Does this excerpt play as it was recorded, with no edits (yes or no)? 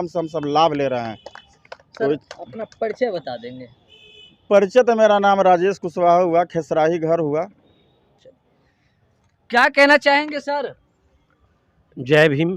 yes